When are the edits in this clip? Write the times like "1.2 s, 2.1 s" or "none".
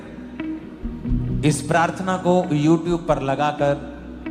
1.0 s